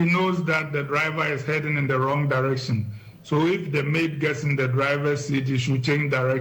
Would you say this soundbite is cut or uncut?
uncut